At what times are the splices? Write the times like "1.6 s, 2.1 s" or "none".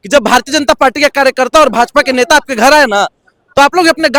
none